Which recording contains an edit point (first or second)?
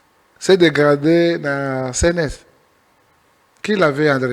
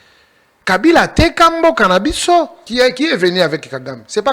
second